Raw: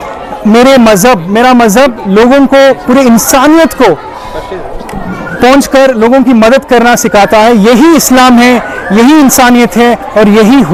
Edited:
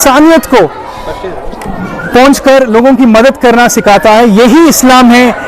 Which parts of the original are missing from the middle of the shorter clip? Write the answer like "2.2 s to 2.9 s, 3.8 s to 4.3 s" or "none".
none